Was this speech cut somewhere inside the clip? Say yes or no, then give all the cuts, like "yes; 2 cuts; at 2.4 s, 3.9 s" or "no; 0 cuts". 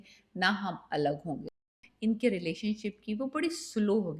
yes; 1 cut; at 1.6 s